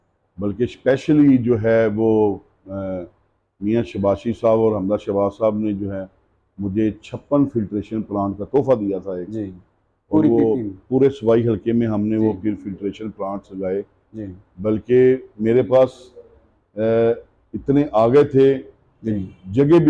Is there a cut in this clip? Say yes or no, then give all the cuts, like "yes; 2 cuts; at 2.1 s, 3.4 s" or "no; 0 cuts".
no; 0 cuts